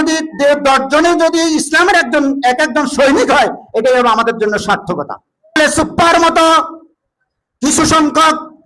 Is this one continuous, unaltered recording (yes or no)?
no